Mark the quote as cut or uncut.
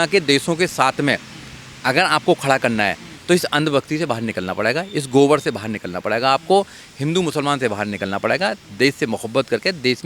uncut